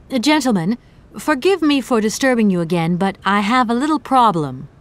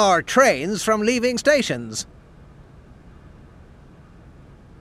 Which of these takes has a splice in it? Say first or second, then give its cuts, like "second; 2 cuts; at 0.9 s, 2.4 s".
second; 1 cut; at 2.1 s